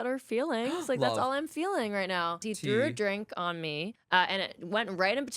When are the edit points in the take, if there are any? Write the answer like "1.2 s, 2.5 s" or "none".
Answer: 2.4 s, 3.9 s